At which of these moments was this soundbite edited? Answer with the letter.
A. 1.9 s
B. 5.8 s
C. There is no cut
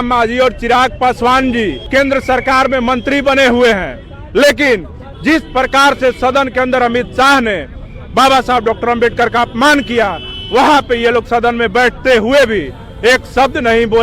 A